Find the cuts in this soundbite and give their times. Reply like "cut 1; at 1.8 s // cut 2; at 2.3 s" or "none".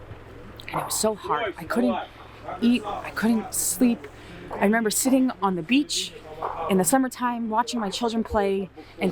none